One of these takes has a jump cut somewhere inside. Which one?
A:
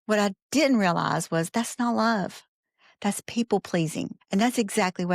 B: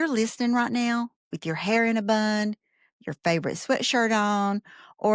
A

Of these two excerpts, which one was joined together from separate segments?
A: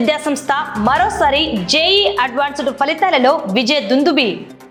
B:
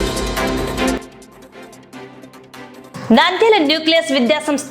B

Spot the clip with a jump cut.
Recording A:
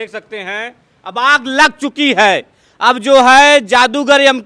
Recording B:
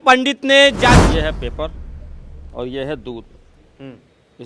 B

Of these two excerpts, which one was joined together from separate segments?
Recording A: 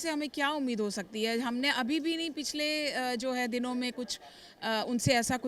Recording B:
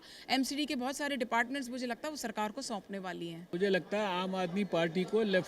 B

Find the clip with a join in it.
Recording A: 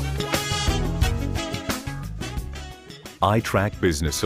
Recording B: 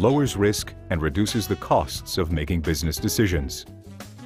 A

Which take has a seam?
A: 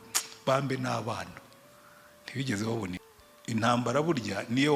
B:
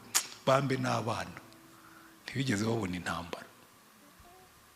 A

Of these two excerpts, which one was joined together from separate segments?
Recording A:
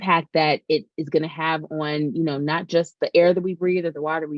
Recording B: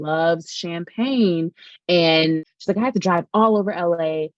B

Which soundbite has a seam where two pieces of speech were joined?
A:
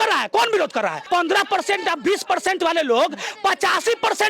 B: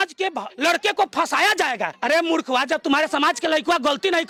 A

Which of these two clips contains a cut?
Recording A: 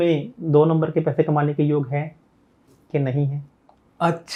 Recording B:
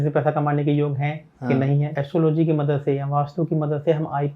B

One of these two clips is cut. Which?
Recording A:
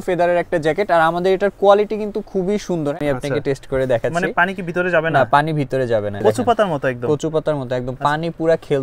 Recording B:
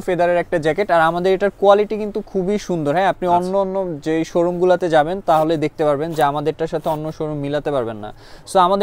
A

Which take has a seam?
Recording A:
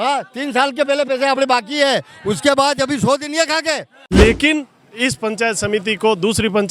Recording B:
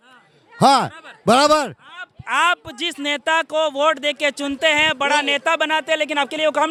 A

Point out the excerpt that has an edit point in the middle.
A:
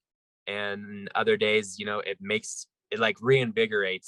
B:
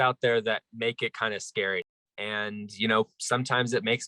B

